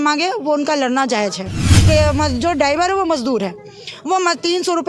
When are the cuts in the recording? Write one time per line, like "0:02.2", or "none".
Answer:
0:01.8